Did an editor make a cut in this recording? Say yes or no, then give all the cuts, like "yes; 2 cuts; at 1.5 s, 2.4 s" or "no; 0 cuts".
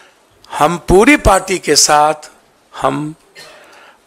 no; 0 cuts